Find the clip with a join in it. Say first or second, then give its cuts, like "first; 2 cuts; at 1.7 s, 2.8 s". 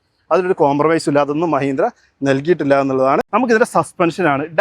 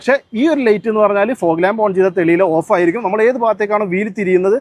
first; 1 cut; at 3.3 s